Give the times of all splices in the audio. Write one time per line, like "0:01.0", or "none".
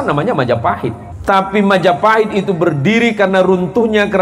0:01.1